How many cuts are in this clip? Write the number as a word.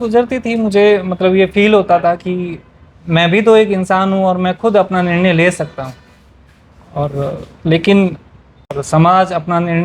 zero